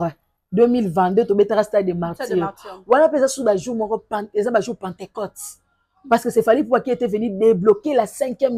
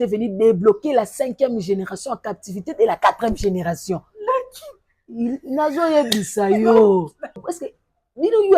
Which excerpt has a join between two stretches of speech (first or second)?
second